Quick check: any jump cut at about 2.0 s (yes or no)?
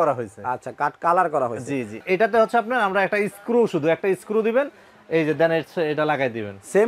yes